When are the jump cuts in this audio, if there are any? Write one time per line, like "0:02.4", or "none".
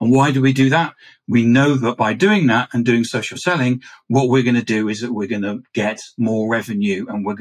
none